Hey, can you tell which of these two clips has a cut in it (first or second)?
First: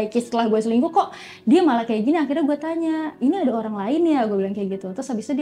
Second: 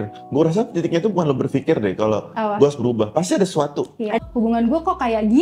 second